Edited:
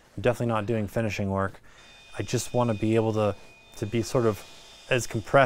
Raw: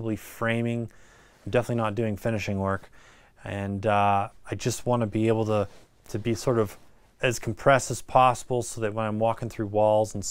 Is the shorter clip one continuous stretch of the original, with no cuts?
no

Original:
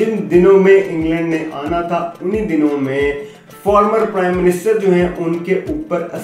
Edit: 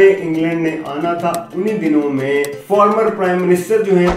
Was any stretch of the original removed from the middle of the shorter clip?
yes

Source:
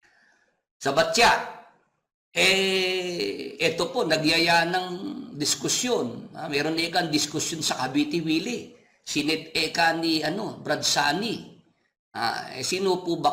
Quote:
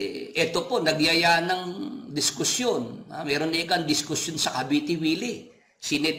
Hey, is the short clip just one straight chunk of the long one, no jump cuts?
yes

